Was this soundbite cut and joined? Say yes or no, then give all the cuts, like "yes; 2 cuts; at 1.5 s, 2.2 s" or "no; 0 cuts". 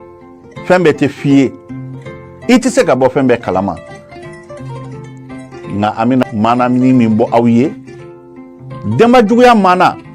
yes; 1 cut; at 6.2 s